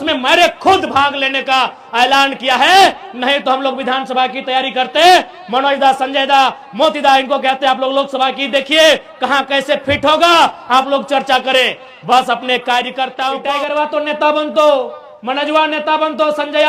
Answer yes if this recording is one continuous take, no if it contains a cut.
no